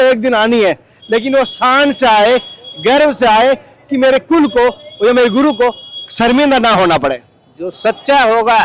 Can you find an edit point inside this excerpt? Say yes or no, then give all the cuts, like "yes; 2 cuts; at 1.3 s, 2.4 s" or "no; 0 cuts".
no; 0 cuts